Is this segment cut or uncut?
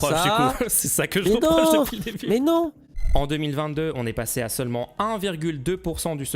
cut